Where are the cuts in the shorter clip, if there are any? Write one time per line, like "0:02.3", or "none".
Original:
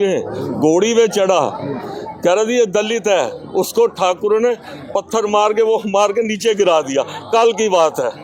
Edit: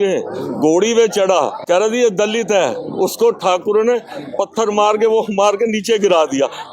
0:01.6

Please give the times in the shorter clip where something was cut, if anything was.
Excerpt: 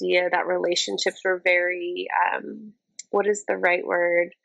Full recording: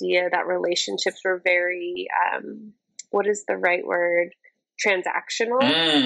none

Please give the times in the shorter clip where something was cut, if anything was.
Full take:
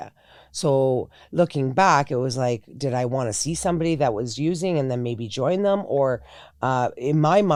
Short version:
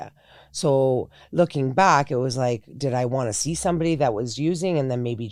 none

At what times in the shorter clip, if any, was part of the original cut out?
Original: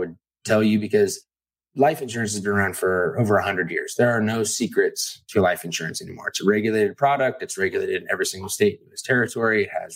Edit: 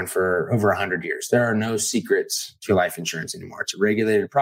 none

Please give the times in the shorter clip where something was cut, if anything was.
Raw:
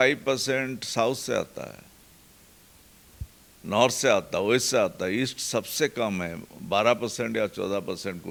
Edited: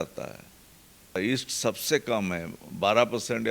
0:01.2

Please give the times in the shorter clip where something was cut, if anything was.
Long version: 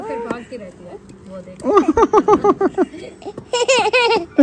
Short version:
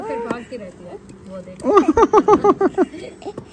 none

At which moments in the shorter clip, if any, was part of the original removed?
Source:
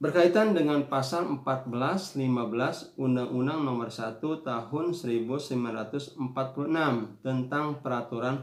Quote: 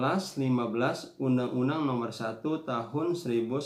none

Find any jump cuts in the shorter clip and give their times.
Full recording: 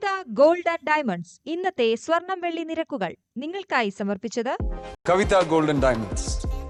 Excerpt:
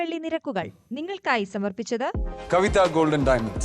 0:02.3

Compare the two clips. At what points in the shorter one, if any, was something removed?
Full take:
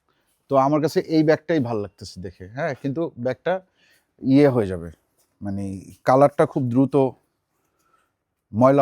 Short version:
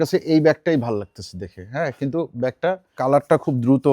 0:02.9

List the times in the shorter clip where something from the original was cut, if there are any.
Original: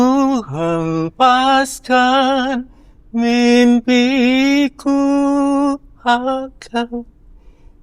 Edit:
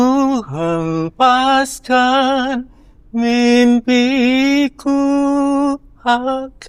none

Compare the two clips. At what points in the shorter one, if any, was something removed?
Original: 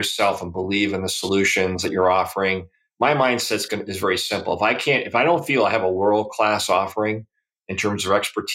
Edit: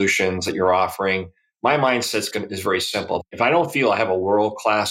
0:03.2

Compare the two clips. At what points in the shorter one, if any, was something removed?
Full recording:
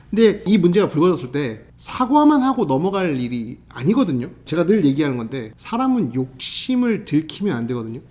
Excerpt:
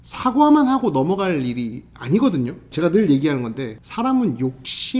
none

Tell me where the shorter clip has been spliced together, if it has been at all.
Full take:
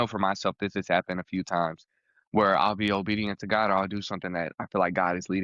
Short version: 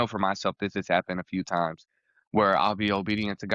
none

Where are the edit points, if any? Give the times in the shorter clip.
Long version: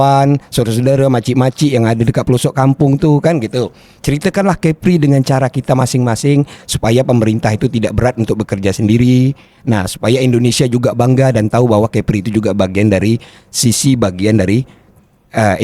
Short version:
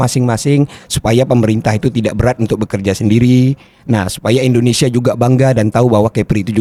none

